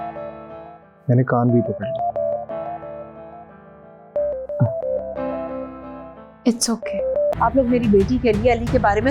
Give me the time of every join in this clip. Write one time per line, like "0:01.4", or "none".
0:07.3

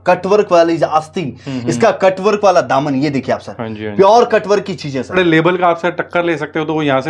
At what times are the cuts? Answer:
0:05.1

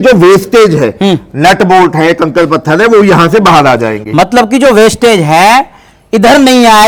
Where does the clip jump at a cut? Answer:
none

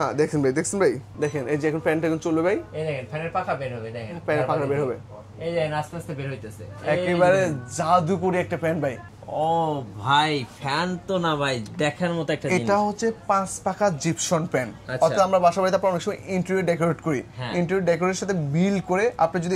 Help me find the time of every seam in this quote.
0:01.1
0:09.1

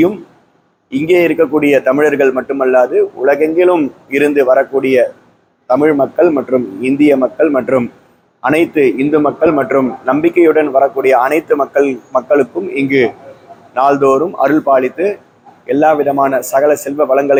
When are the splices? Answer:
none

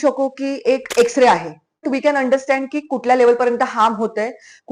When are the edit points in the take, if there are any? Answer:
0:01.8

